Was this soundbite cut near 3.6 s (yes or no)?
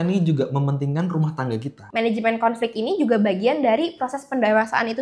no